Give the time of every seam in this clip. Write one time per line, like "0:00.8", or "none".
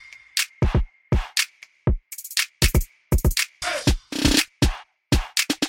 0:01.0